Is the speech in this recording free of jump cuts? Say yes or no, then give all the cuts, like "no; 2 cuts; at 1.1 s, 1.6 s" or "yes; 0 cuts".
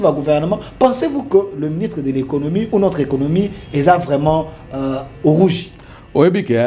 yes; 0 cuts